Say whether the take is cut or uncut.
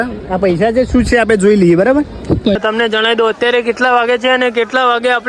cut